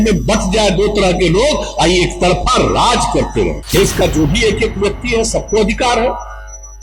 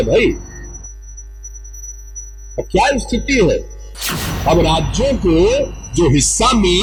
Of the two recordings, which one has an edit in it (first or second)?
first